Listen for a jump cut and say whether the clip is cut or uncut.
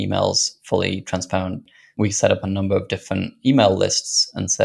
cut